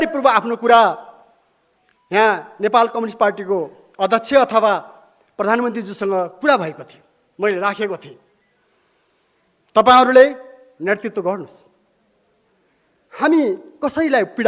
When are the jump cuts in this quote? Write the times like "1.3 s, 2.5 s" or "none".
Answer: none